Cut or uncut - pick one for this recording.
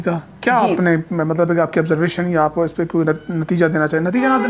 uncut